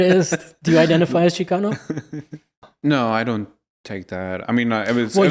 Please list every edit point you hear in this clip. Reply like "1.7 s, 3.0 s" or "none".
2.6 s